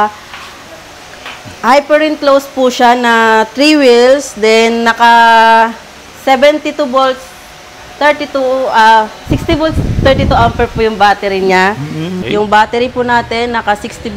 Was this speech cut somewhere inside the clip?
yes; 1 cut; at 12.0 s

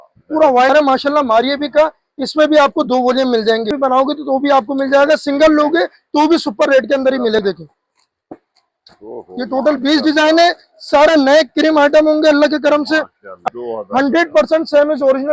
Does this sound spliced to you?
yes; 4 cuts; at 0.7 s, 3.7 s, 7.4 s, 13.4 s

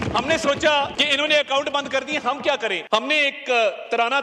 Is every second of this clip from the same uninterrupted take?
no; 2 cuts; at 1.0 s, 2.8 s

